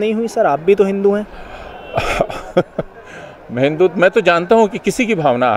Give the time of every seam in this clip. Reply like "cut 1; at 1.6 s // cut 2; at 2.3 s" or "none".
none